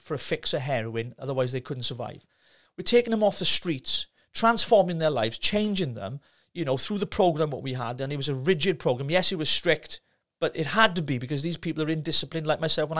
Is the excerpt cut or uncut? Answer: uncut